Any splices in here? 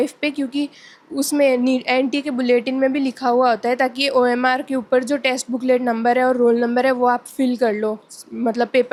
no; 0 cuts

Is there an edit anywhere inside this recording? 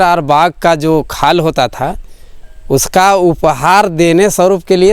no; 0 cuts

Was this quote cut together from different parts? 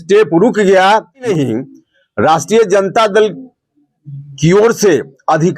yes; 1 cut; at 1.3 s

